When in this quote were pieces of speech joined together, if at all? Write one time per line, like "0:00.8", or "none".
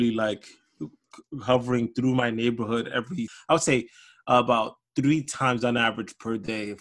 0:03.3